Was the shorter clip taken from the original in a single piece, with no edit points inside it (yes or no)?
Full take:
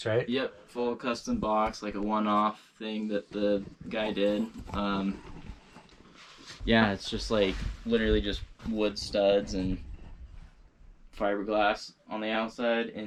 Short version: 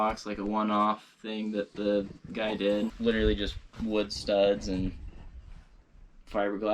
no